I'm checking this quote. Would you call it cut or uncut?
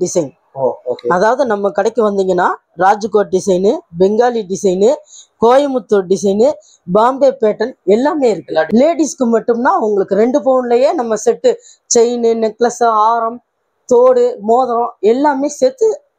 cut